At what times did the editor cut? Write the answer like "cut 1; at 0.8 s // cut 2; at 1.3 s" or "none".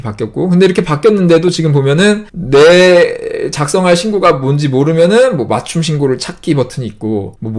none